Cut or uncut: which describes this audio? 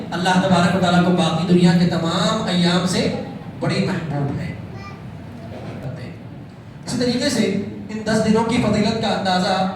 cut